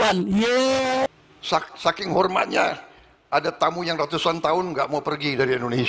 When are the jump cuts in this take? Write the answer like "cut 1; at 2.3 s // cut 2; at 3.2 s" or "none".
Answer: cut 1; at 1.1 s